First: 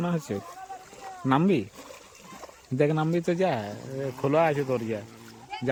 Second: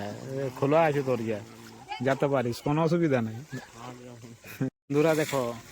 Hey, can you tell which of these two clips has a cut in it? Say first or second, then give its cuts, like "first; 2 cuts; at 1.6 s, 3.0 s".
second; 1 cut; at 4.7 s